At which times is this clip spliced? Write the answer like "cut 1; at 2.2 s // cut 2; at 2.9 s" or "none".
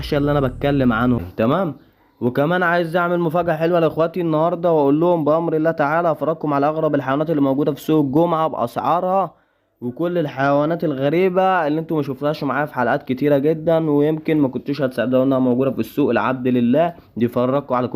cut 1; at 1.2 s